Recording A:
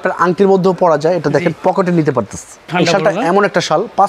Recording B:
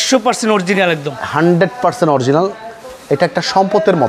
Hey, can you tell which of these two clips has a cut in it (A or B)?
A